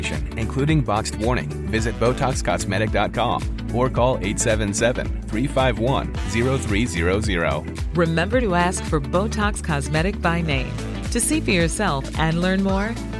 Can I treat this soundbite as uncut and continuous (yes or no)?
yes